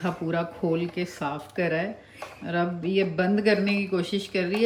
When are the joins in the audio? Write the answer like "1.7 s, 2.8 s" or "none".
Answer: none